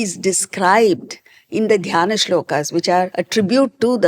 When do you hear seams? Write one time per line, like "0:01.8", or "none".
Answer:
0:03.1